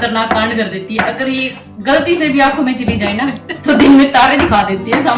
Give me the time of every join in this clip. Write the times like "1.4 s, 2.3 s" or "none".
none